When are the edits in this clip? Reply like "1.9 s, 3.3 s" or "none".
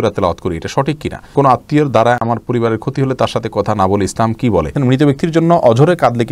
1.3 s, 4.7 s